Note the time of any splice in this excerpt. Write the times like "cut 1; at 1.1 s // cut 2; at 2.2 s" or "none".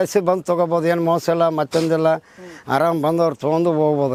none